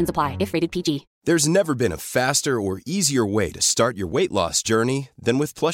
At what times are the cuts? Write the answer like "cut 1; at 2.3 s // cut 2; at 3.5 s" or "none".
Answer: cut 1; at 1.1 s